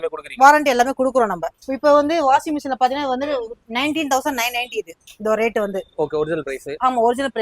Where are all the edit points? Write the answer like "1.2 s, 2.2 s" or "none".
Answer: 1.5 s